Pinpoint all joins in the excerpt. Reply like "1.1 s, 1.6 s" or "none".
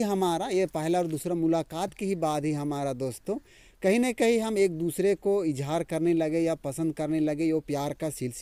none

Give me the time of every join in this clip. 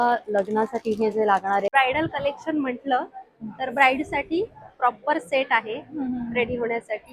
1.7 s

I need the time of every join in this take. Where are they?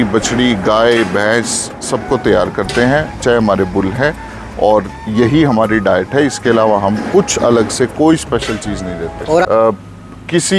9.4 s

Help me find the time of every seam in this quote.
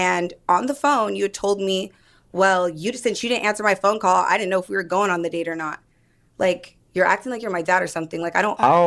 none

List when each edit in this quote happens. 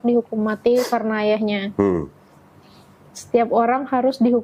none

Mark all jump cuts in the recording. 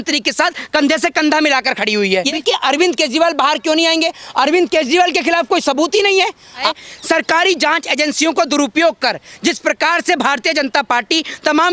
2.4 s, 6.6 s

